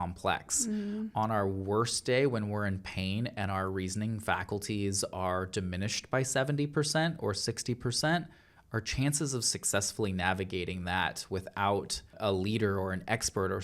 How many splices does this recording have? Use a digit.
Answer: 1